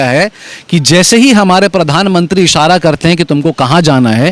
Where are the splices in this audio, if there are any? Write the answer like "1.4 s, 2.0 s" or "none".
none